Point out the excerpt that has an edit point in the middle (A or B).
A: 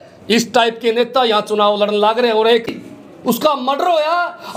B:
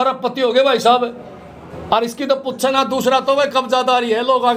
A